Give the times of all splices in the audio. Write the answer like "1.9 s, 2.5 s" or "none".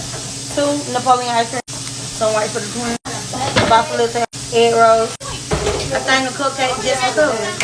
none